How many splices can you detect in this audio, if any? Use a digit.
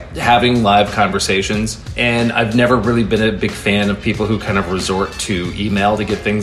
1